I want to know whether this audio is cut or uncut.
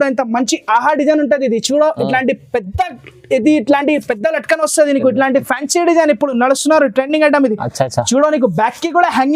uncut